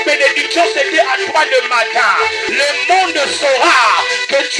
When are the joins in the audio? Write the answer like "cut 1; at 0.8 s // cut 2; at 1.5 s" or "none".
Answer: cut 1; at 2.4 s